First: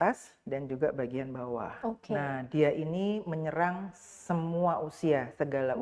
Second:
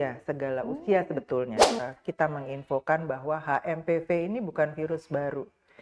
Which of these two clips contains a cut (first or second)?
second